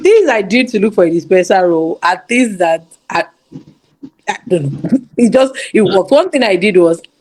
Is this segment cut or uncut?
uncut